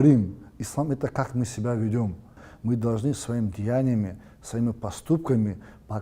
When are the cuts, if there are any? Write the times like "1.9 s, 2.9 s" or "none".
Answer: 2.5 s